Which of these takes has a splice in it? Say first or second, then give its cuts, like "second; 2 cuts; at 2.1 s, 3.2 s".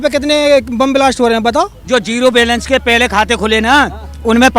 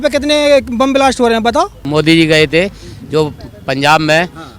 first; 1 cut; at 1.8 s